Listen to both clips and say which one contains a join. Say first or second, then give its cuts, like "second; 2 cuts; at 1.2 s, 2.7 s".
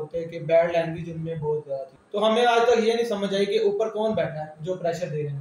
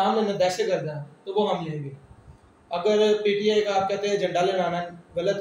first; 1 cut; at 2.0 s